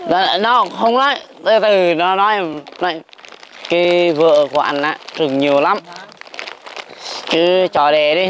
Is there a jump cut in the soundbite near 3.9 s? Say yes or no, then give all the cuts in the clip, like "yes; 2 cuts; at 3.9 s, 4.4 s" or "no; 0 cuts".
no; 0 cuts